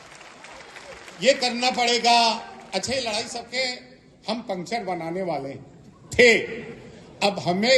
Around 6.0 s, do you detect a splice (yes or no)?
no